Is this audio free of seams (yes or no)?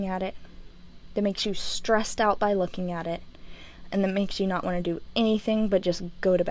yes